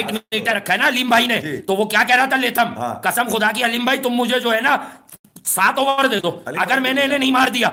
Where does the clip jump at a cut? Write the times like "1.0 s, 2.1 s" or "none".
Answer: none